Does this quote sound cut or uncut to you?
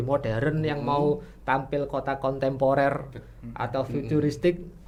uncut